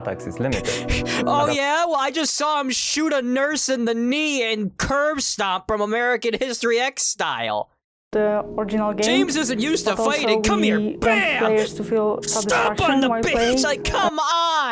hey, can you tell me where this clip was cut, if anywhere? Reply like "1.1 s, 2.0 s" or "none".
13.8 s